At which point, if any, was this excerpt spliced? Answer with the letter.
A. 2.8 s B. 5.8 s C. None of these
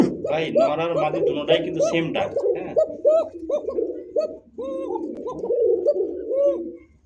C